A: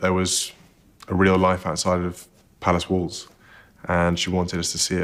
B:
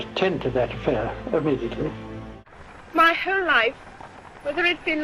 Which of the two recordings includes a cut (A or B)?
B